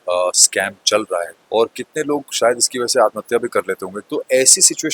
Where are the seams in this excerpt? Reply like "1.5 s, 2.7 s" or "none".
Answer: 1.4 s, 3.9 s